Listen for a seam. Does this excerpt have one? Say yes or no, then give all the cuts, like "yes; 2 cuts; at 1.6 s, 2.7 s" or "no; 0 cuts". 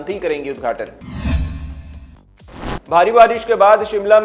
no; 0 cuts